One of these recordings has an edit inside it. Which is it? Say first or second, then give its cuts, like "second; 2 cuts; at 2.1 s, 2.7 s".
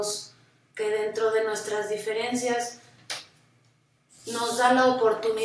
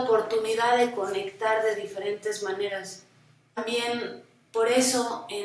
second; 1 cut; at 3.6 s